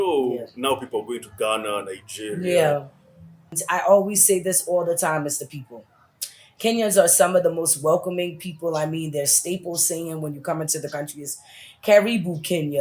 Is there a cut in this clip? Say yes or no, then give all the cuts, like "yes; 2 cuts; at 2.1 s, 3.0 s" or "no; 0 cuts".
yes; 1 cut; at 3.6 s